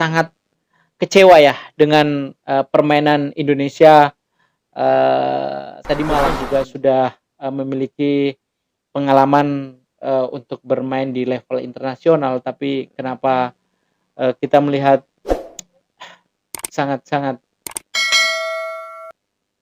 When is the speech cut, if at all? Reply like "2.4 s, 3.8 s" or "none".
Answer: 6.4 s

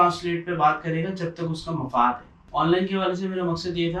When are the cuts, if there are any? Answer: 2.3 s

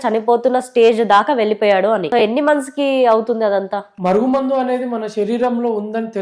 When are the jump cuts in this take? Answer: 2.1 s, 3.9 s

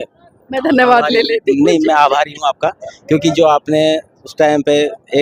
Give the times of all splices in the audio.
none

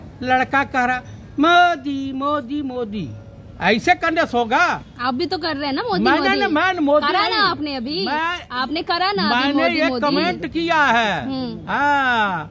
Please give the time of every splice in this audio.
none

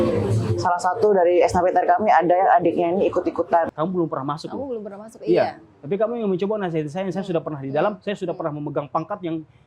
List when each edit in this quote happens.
3.7 s

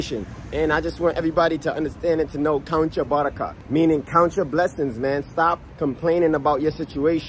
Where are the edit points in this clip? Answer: 3.5 s, 5.7 s

